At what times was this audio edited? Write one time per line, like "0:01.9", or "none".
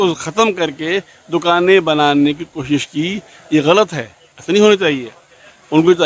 none